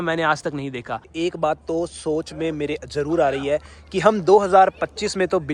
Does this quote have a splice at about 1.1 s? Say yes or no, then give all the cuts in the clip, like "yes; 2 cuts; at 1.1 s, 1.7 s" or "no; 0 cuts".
yes; 1 cut; at 1.1 s